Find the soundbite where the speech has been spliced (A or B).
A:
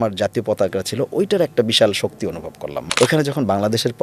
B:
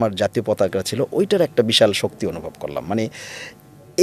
A